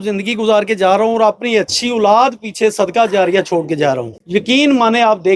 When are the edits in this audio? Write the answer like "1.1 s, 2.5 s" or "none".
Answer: 4.1 s